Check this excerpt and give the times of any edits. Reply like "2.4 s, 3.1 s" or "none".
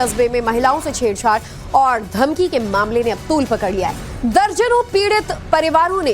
1.9 s